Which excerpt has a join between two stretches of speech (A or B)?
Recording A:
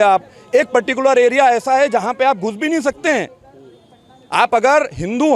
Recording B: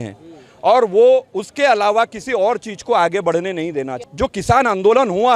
B